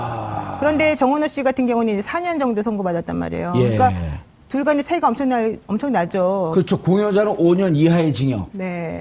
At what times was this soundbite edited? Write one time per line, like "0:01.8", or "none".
0:03.0